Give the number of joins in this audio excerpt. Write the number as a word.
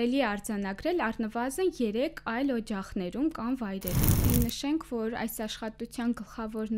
one